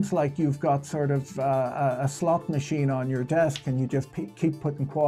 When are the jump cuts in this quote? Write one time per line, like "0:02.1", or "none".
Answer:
none